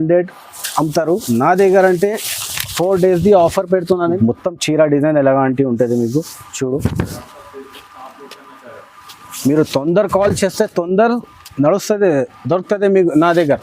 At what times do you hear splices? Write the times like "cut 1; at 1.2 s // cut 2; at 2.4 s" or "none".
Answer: cut 1; at 4.2 s